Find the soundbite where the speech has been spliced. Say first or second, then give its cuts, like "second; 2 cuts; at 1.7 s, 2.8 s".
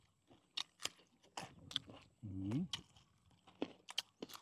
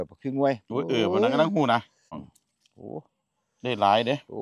second; 1 cut; at 2.1 s